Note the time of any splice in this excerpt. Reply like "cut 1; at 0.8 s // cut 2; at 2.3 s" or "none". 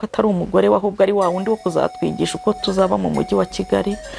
none